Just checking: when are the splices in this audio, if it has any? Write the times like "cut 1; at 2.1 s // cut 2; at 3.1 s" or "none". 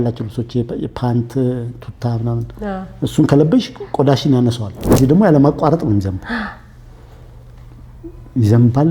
cut 1; at 4.9 s